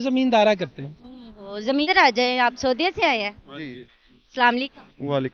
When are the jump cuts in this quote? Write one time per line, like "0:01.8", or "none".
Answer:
0:01.9